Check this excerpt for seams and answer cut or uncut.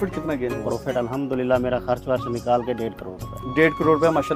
uncut